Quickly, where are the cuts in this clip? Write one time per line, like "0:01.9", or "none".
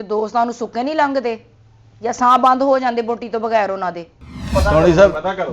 0:04.4